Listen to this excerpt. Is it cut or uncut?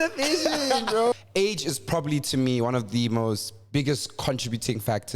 cut